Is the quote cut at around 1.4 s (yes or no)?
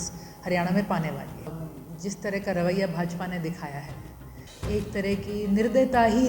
yes